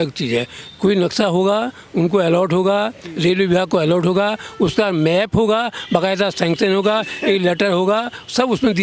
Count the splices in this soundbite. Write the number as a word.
zero